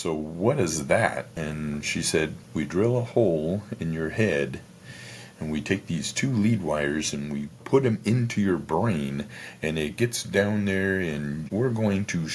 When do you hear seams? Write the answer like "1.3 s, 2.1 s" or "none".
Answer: 1.3 s, 2.4 s, 7.5 s, 11.5 s